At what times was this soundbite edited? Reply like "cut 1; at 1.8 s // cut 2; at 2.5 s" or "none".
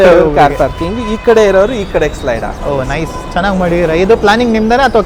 none